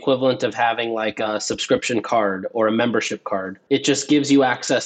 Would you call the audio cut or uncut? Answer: cut